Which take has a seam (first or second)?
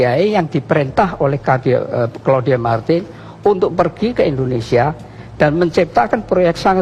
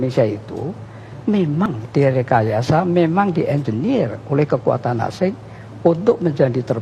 second